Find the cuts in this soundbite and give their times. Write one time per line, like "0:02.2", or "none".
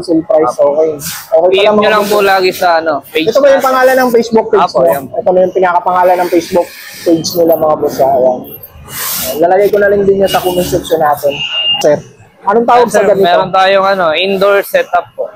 0:11.8